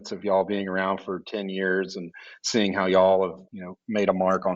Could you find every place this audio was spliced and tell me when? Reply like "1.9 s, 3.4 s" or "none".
none